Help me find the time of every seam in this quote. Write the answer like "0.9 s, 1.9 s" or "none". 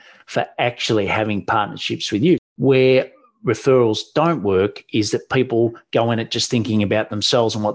2.4 s